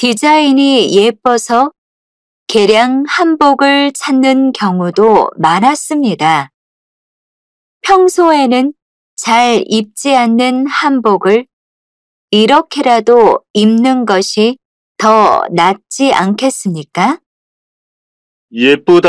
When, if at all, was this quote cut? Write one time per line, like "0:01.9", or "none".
none